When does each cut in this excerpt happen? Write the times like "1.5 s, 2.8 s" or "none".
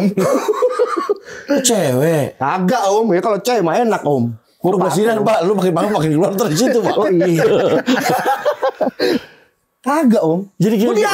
none